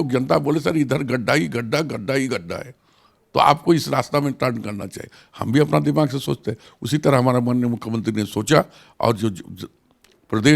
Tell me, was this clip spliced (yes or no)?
no